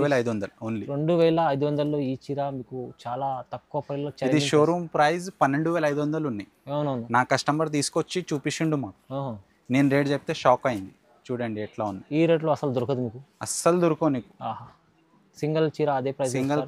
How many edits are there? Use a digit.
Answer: 0